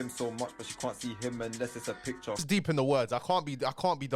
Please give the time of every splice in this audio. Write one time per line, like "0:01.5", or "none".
0:02.4